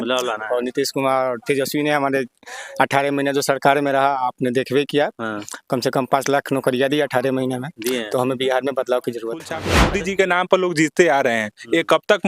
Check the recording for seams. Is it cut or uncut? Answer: cut